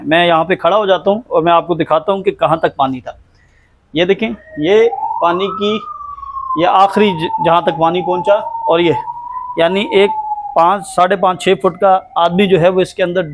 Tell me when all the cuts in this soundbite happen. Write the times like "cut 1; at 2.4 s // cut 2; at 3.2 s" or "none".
none

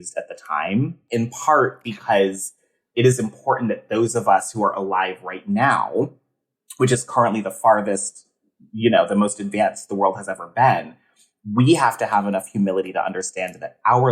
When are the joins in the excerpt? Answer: cut 1; at 1.0 s

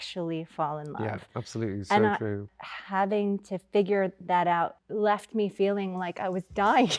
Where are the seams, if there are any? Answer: cut 1; at 2.4 s // cut 2; at 4.8 s

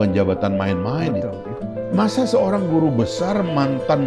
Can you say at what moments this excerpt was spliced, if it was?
cut 1; at 1.4 s

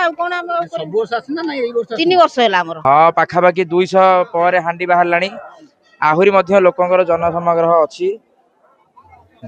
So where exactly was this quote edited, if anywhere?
cut 1; at 2.7 s

